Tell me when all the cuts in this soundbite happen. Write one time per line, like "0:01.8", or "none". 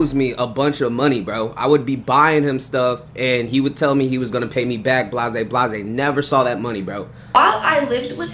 0:07.3